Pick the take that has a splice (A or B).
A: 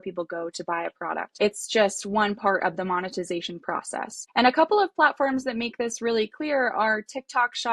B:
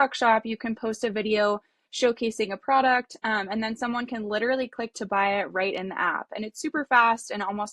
A